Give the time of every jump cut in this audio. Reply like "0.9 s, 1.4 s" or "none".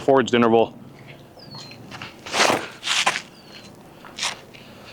none